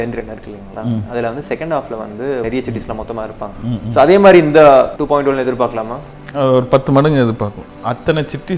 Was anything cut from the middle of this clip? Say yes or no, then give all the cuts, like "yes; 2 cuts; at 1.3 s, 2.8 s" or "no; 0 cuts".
yes; 3 cuts; at 2.4 s, 5.0 s, 7.7 s